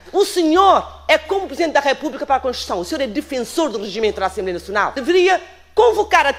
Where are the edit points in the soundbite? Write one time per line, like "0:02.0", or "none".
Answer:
0:05.0